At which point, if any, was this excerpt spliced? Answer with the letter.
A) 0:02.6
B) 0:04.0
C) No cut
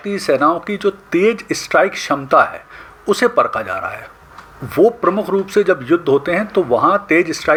C